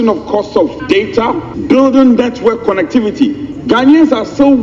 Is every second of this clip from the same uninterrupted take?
no; 1 cut; at 1.2 s

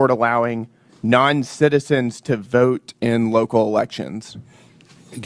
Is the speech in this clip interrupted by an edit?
no; 0 cuts

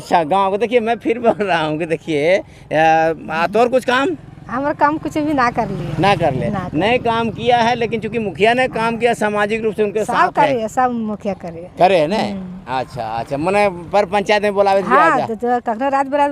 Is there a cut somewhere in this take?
no; 0 cuts

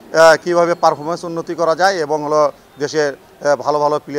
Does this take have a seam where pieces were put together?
no; 0 cuts

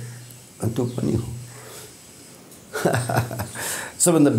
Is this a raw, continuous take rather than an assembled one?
yes; 0 cuts

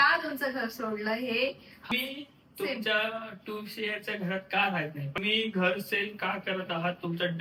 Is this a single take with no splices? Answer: no; 2 cuts; at 1.9 s, 5.2 s

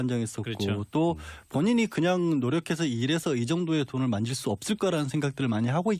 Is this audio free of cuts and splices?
no; 1 cut; at 1.2 s

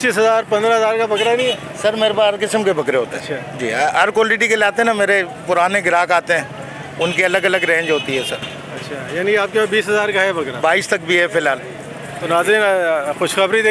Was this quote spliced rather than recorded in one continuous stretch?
no; 0 cuts

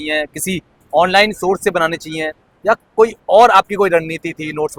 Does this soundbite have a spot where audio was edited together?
no; 0 cuts

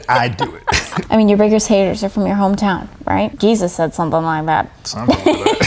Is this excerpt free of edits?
no; 2 cuts; at 1.0 s, 3.3 s

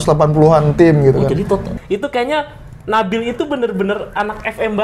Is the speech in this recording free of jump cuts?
no; 1 cut; at 1.7 s

